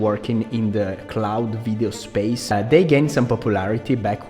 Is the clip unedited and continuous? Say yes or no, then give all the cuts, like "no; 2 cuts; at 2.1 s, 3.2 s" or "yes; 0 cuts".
no; 1 cut; at 2.5 s